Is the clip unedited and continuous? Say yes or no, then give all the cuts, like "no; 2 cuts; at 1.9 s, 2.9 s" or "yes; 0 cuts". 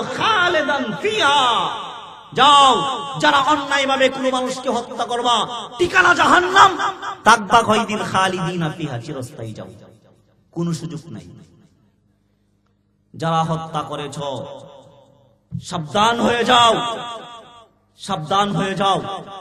yes; 0 cuts